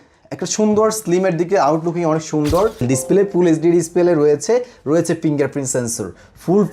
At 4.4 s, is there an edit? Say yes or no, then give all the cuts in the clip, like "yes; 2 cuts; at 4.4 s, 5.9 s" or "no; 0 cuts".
no; 1 cut; at 2.8 s